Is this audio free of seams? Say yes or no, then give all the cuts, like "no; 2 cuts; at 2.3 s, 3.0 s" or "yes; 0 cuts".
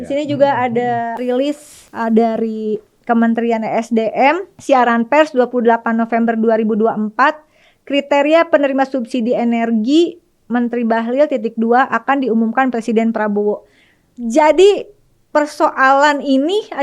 no; 2 cuts; at 1.2 s, 4.5 s